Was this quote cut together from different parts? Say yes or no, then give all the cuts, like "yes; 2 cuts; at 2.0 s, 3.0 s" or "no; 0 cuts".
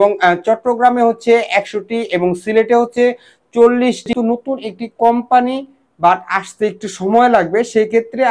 yes; 1 cut; at 4.1 s